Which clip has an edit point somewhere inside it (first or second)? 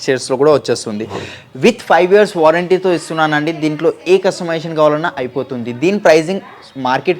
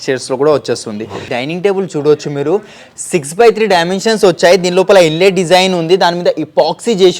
second